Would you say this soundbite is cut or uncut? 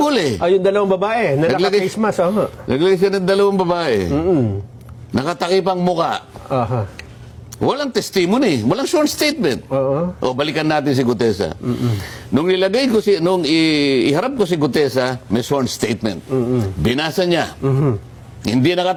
uncut